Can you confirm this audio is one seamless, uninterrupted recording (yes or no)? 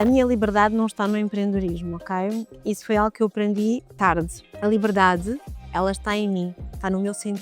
no